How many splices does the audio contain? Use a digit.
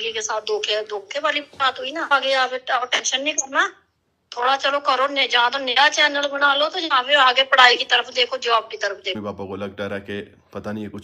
2